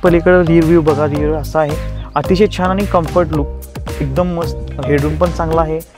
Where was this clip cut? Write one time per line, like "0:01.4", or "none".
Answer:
none